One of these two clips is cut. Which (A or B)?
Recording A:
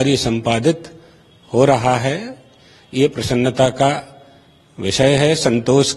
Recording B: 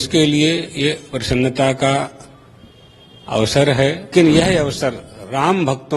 B